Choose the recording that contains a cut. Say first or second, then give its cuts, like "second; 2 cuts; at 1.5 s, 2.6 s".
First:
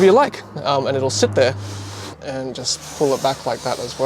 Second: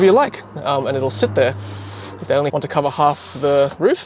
first; 1 cut; at 2.2 s